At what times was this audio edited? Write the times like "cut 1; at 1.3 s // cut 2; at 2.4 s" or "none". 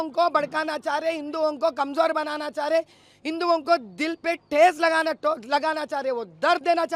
none